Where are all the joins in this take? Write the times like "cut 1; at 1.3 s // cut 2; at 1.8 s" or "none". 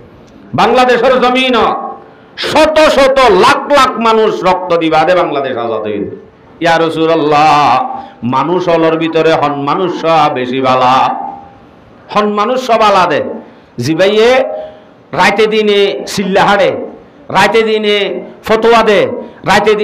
cut 1; at 6.4 s